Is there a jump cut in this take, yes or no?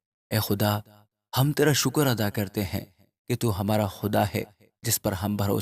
no